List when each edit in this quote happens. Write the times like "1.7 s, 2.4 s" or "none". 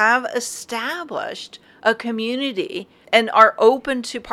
3.0 s